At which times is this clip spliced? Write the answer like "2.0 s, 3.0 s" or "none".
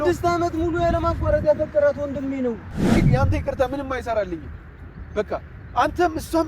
2.9 s

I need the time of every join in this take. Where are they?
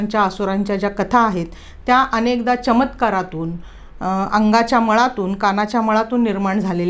none

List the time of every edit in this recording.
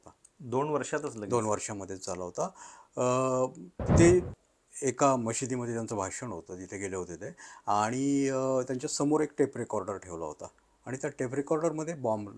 none

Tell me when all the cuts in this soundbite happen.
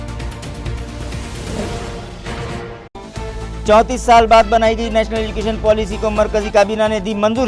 1.5 s

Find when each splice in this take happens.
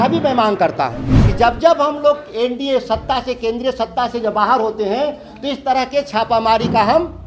1.2 s

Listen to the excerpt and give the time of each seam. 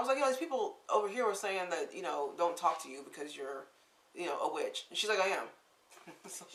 none

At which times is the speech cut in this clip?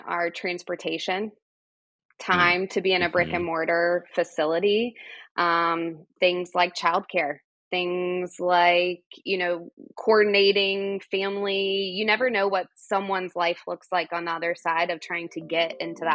none

